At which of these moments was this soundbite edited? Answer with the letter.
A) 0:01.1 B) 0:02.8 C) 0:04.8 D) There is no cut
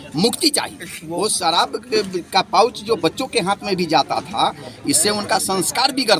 D